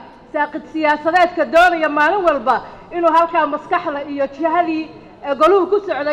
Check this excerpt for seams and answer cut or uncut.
uncut